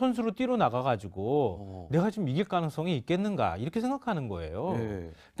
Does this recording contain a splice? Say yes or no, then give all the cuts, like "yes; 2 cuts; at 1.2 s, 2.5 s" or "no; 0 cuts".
yes; 1 cut; at 4.3 s